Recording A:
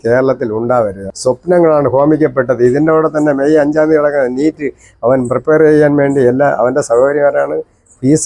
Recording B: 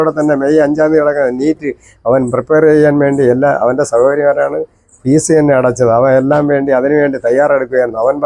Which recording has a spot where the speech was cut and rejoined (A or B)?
A